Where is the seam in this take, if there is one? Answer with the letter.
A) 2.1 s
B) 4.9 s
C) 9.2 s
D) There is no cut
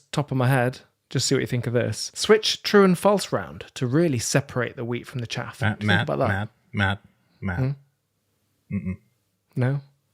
A